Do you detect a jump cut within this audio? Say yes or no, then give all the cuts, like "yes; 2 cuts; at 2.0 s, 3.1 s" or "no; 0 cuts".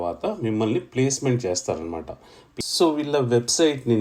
yes; 1 cut; at 2.4 s